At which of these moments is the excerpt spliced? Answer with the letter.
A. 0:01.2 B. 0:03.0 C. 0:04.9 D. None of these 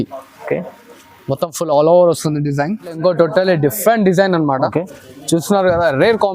B